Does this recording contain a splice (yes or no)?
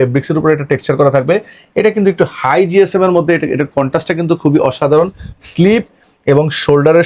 no